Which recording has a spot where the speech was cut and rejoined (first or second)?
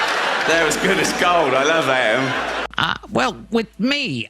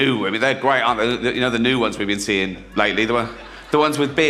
first